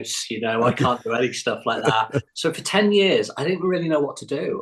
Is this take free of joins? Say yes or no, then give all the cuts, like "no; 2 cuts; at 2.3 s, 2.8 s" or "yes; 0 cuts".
no; 1 cut; at 2.3 s